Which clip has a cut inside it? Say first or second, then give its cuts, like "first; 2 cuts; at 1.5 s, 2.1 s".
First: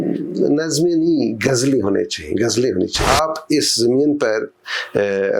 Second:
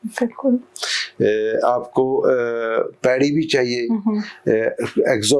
first; 1 cut; at 3.0 s